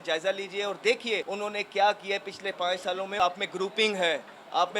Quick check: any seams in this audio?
yes; 2 cuts; at 1.3 s, 3.2 s

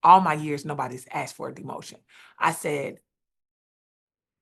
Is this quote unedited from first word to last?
yes; 0 cuts

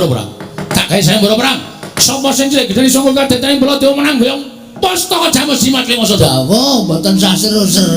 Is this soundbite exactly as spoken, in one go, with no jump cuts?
no; 1 cut; at 6.2 s

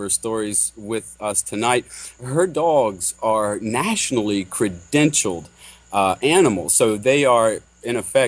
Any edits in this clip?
yes; 1 cut; at 2.8 s

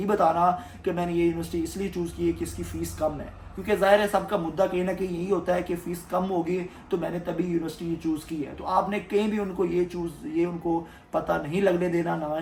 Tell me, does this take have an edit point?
no; 0 cuts

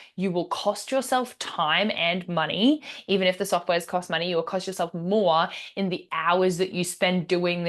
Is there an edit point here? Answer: no; 0 cuts

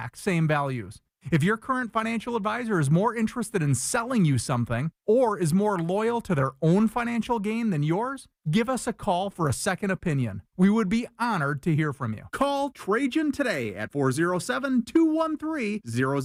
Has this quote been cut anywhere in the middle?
no; 0 cuts

